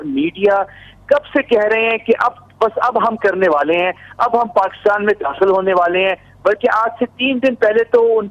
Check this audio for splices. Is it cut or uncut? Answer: uncut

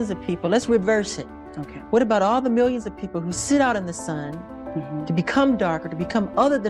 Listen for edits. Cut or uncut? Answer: uncut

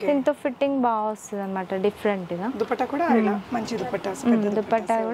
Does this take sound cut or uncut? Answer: uncut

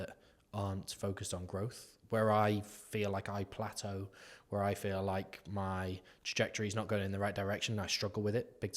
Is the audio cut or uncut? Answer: uncut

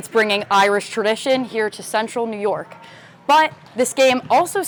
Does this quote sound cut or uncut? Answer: uncut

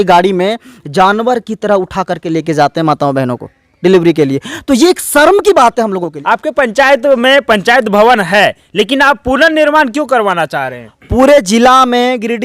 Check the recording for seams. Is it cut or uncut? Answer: cut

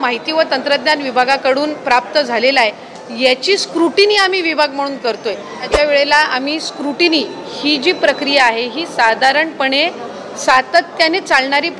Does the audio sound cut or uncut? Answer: cut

